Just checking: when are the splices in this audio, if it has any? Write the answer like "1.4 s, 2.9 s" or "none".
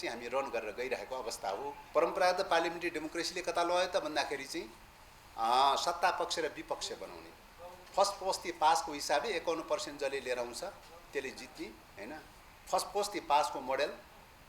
1.8 s